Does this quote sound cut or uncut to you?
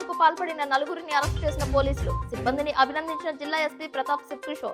uncut